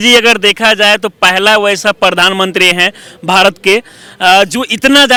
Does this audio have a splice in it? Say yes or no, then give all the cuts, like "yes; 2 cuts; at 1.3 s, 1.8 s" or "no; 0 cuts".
no; 0 cuts